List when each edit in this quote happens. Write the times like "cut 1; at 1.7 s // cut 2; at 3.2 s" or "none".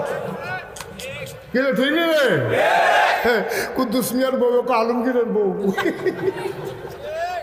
none